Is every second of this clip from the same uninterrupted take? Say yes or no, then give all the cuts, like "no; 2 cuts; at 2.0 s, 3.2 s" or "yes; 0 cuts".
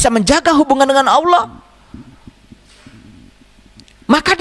yes; 0 cuts